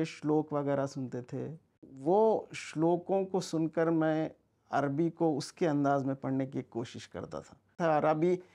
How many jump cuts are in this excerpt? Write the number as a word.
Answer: two